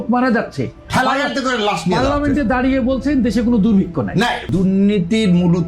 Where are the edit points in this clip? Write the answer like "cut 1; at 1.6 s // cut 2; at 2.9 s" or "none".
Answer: cut 1; at 4.5 s